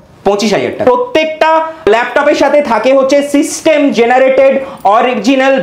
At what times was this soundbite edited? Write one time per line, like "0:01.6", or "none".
0:00.8
0:01.9